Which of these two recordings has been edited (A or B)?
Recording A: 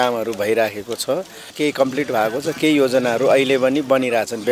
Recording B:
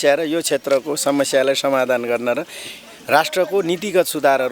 A